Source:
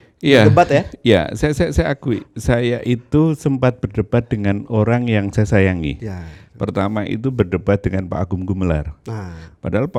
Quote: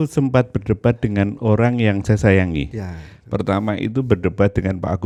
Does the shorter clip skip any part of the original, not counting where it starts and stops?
no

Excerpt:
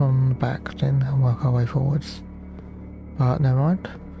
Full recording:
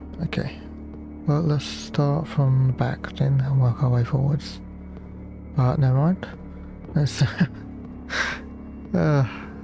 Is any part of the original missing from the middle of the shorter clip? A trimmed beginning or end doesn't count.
no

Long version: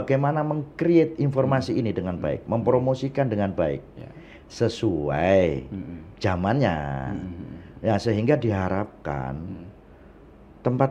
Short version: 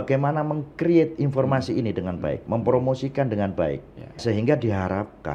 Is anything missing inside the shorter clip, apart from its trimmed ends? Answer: yes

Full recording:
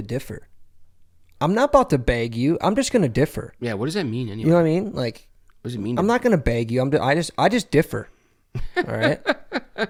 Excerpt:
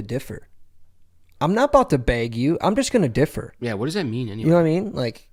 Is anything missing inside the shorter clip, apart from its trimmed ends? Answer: no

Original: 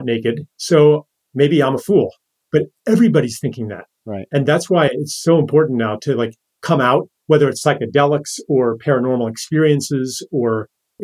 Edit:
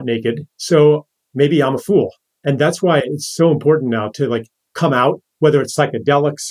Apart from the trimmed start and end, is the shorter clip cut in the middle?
yes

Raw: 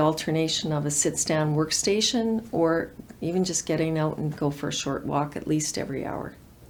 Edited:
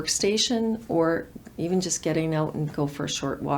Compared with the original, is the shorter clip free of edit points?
yes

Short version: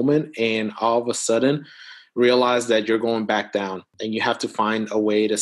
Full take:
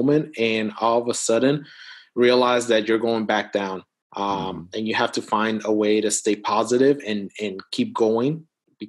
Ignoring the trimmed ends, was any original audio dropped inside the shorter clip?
yes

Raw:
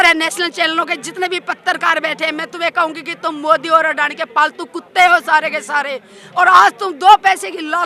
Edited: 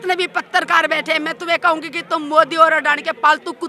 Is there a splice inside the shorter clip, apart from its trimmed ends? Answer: no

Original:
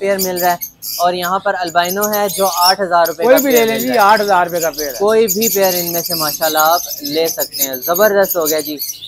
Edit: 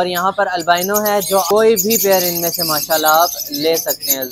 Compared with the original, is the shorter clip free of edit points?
no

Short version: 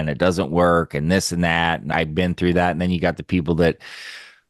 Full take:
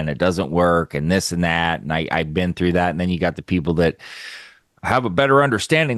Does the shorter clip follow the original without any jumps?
no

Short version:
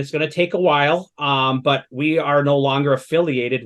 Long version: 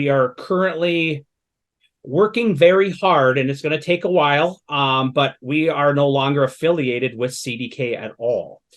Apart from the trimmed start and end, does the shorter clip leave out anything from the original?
no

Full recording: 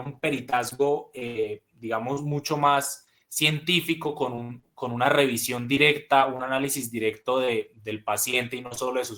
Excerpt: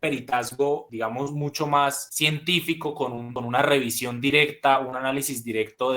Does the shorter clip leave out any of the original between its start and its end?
yes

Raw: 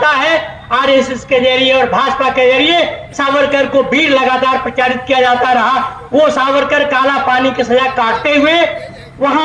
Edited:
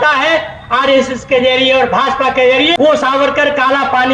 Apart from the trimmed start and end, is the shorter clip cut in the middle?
yes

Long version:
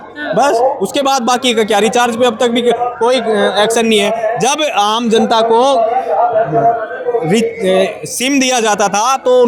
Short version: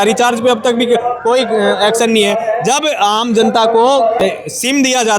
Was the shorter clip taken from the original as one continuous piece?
no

